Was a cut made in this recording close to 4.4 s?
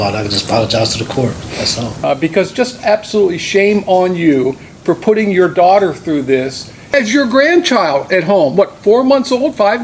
no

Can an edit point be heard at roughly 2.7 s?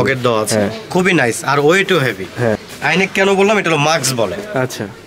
yes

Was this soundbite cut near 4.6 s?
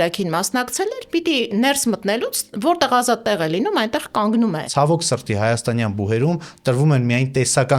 yes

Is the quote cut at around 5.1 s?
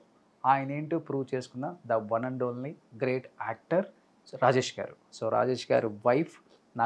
yes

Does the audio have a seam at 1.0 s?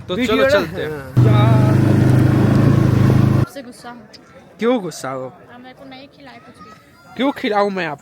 no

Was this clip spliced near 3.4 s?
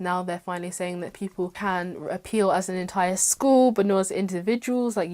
no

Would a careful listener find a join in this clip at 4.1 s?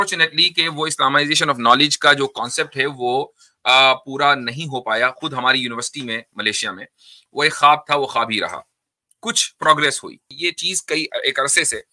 no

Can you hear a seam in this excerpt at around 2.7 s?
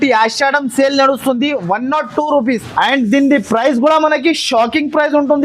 yes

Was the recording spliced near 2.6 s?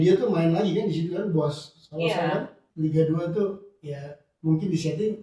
yes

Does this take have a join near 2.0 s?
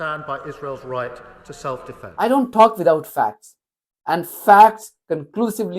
yes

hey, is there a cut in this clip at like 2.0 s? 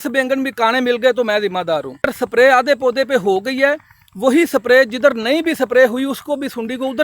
yes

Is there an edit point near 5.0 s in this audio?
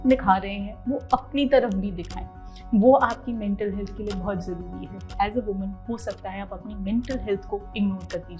yes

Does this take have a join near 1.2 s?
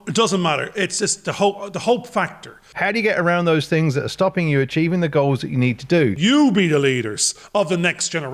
no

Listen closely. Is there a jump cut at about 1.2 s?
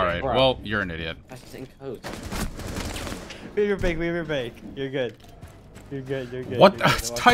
yes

